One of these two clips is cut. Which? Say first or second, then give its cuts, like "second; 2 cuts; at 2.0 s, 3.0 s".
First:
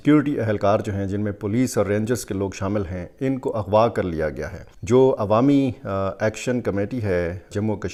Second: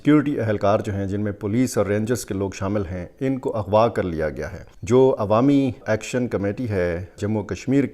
second; 1 cut; at 5.8 s